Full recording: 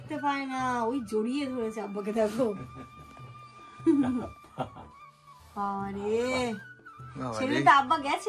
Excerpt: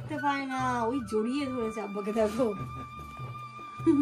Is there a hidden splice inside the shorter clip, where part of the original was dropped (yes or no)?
no